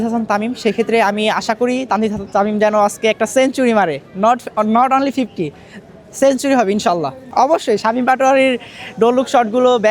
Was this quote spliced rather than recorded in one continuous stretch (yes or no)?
no